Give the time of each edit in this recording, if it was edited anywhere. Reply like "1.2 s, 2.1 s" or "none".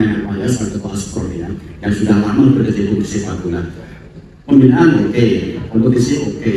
none